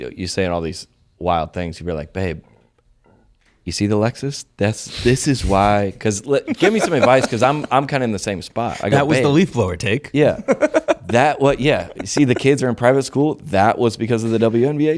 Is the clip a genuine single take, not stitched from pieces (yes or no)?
yes